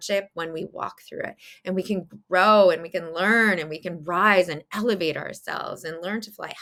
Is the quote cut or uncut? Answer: uncut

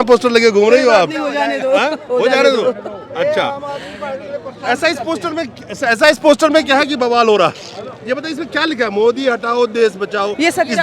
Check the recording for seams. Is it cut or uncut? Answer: uncut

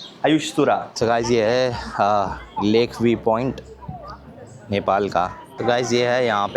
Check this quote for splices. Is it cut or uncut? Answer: cut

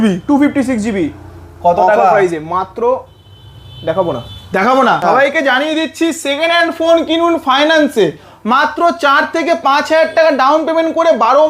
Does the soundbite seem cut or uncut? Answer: cut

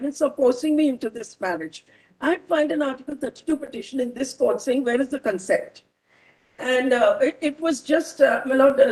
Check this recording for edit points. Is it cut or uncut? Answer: uncut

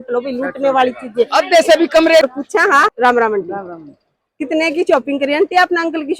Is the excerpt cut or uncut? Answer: cut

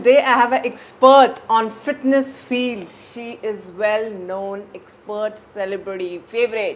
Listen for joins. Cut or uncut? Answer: uncut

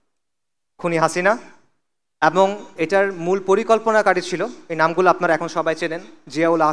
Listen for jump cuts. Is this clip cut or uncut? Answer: uncut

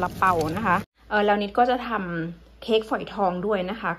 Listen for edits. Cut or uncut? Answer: cut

